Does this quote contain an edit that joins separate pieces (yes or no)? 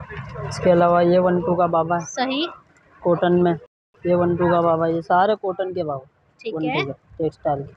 no